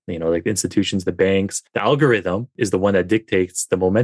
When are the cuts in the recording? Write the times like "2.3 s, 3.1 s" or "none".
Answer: 1.6 s, 2.5 s